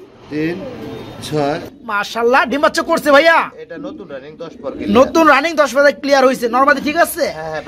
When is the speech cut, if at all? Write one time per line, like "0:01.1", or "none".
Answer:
0:01.7